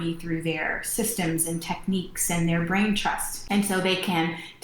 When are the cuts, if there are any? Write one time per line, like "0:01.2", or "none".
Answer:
0:03.3

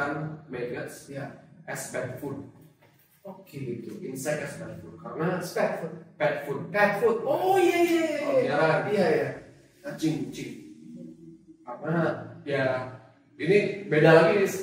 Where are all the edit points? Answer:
none

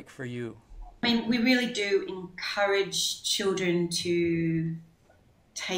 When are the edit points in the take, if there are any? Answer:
0:01.0

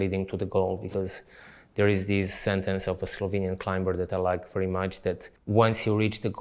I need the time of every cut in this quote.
0:05.3

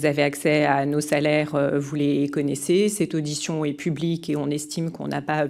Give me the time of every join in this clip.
none

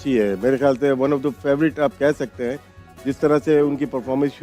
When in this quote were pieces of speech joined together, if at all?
none

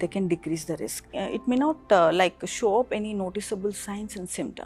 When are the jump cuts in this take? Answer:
0:01.2

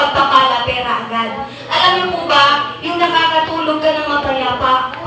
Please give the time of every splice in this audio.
none

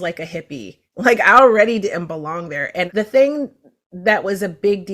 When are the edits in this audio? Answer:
0:02.9

